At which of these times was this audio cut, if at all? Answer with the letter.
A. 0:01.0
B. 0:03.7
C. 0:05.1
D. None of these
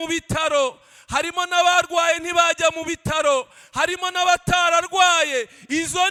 D